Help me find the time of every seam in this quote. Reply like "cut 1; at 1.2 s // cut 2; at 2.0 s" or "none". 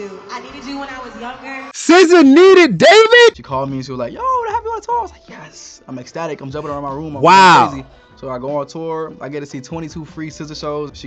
cut 1; at 3.3 s